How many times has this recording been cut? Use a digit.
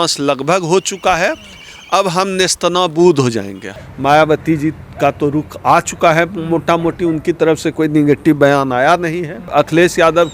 2